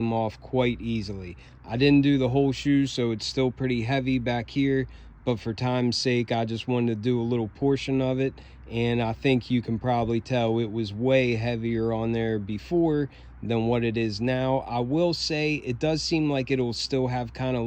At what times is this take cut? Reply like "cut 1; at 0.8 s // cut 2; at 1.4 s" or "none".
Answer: none